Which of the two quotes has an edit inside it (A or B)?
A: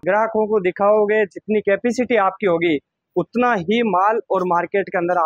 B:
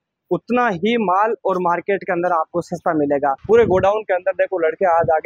B